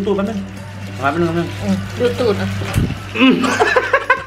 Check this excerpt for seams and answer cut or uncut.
uncut